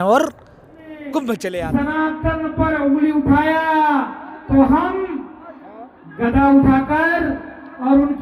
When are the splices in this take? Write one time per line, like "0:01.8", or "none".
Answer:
0:01.6

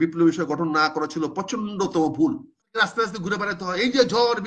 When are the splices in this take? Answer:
0:02.7

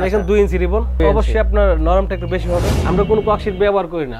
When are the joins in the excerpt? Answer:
0:01.0
0:02.7

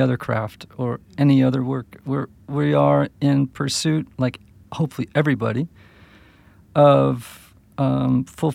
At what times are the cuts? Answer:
none

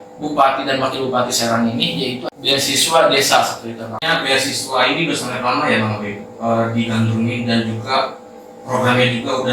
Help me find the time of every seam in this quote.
0:02.2
0:04.0

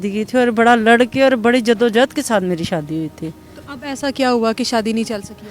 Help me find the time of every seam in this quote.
none

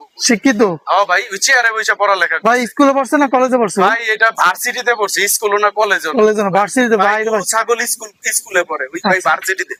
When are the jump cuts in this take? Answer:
none

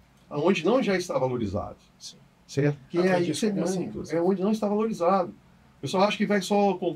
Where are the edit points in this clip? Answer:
none

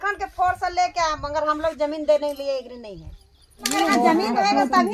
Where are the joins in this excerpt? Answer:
0:03.7

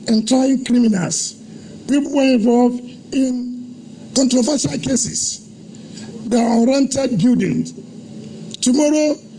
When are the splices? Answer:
none

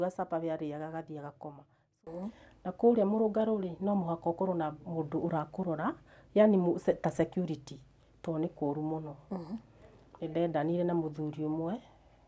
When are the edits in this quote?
0:01.9

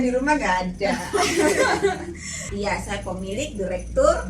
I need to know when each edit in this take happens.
0:02.5

